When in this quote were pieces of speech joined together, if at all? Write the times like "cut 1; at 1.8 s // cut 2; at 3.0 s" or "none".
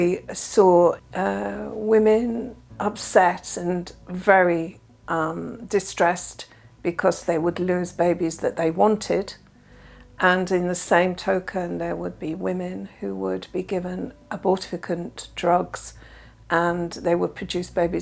cut 1; at 1.0 s